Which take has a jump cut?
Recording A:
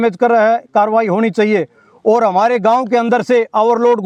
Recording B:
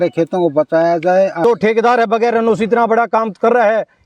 B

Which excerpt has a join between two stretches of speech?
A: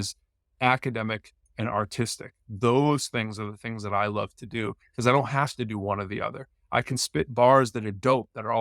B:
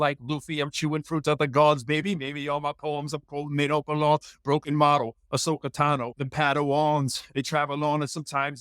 B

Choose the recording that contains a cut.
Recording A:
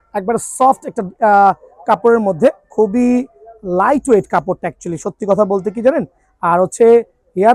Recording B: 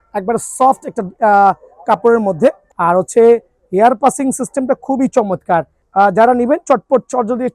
B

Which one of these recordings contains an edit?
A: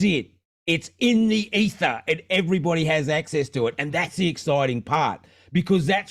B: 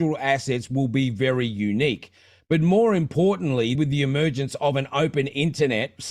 B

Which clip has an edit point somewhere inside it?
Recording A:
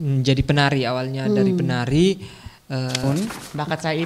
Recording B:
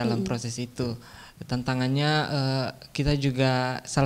A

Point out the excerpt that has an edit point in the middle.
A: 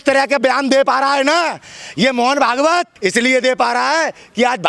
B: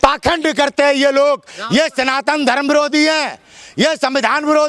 B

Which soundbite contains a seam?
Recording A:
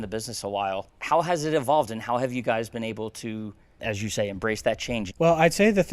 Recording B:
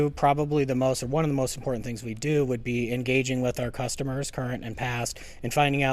A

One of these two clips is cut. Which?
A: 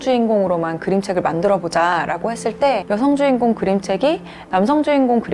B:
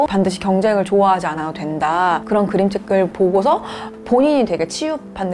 B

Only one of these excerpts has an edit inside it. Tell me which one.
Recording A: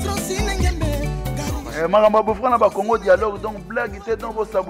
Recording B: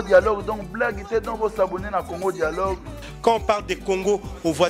A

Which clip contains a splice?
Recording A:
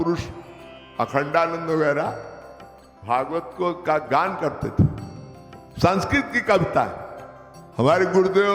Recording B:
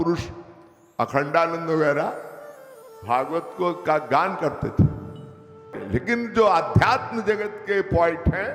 B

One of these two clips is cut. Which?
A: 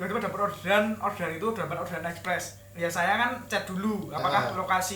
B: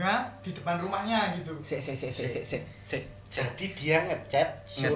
A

